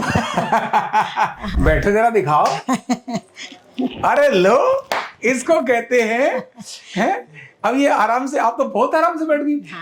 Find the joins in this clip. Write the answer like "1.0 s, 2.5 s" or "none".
1.4 s